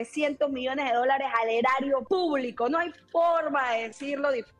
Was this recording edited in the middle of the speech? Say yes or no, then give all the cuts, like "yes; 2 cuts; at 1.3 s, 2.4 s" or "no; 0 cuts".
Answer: yes; 1 cut; at 2.0 s